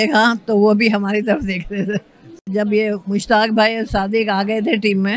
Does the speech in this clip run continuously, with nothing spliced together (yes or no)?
no